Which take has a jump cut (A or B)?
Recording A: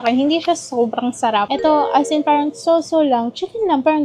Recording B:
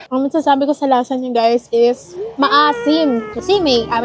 A